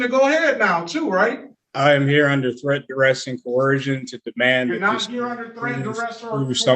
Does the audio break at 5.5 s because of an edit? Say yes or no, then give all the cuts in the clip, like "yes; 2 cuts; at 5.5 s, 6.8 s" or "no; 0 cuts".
no; 1 cut; at 1.4 s